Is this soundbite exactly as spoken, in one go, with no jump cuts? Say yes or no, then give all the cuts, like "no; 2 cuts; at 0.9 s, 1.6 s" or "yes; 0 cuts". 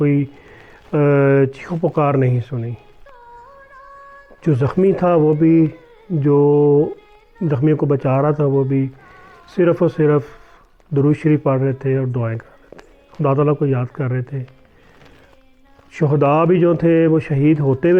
yes; 0 cuts